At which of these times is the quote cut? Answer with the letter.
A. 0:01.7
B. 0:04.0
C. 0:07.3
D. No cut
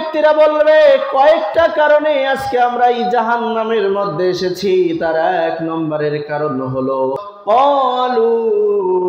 C